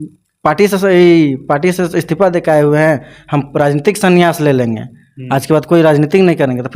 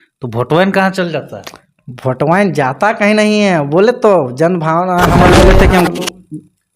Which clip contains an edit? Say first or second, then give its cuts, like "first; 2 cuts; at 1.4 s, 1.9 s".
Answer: second; 1 cut; at 5.3 s